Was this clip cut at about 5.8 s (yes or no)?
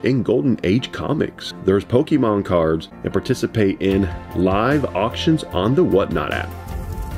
no